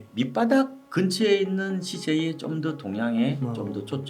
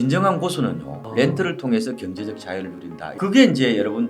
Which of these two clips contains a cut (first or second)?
second